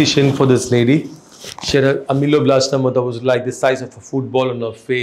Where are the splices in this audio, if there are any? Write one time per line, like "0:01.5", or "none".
none